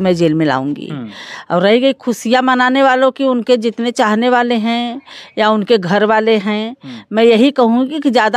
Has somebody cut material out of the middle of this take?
no; 0 cuts

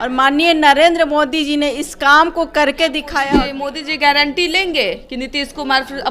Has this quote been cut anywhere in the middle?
yes; 1 cut; at 3.4 s

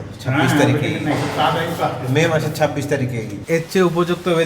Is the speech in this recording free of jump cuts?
no; 1 cut; at 3.5 s

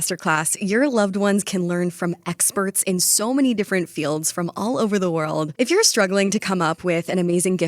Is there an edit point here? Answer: yes; 1 cut; at 5.5 s

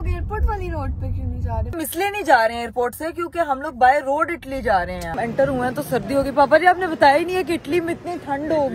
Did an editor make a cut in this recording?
yes; 2 cuts; at 1.8 s, 5.1 s

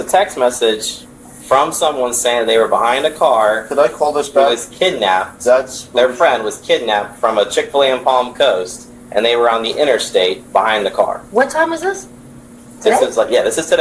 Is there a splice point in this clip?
no; 0 cuts

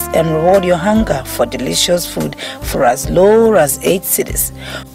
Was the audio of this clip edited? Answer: no; 0 cuts

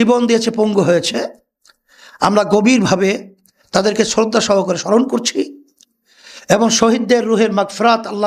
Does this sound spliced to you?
no; 0 cuts

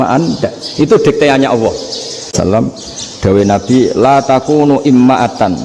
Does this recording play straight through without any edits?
no; 1 cut; at 2.3 s

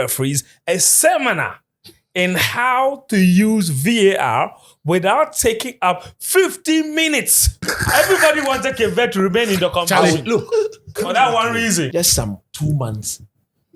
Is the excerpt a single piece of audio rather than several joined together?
no; 2 cuts; at 7.7 s, 11.9 s

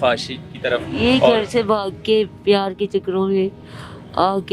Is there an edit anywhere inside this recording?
no; 0 cuts

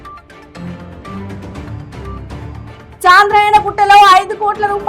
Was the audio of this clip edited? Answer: no; 0 cuts

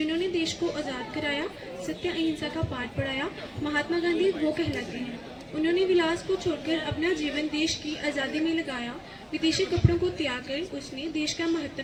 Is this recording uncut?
yes; 0 cuts

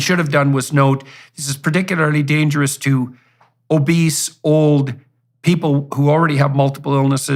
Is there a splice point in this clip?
no; 0 cuts

